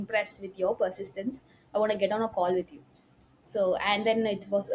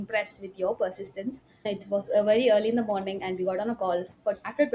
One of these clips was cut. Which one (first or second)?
second